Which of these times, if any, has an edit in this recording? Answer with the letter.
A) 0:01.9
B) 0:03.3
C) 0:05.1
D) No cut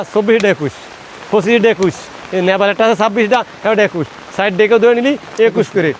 D